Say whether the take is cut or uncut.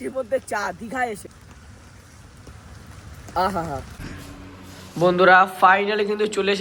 uncut